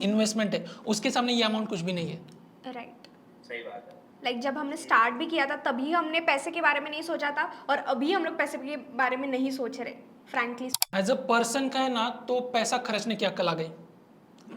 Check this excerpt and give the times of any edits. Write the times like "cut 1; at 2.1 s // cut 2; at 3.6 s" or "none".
cut 1; at 10.8 s